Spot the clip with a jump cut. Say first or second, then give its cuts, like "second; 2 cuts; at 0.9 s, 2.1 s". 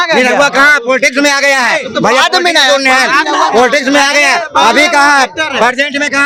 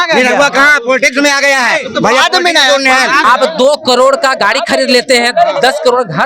second; 1 cut; at 3.2 s